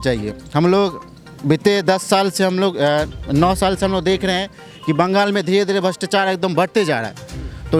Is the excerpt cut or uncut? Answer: uncut